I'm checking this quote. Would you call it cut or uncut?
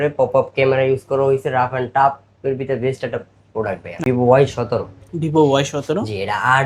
cut